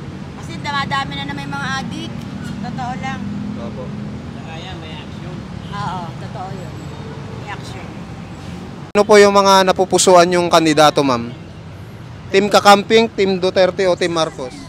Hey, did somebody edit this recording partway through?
yes; 1 cut; at 9.0 s

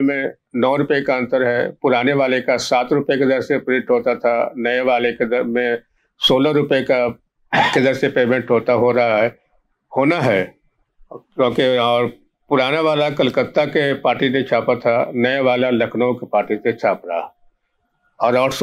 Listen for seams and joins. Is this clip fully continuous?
yes; 0 cuts

